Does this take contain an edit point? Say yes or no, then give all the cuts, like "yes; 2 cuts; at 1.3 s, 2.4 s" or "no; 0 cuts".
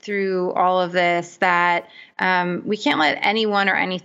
no; 0 cuts